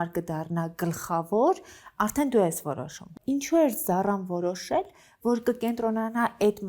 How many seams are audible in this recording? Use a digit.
1